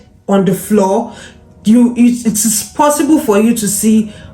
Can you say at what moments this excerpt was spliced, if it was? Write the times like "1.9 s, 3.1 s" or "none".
none